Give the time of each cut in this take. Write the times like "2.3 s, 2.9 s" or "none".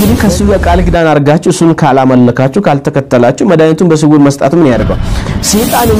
5.0 s